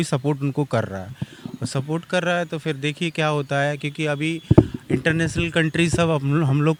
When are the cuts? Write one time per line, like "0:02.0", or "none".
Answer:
none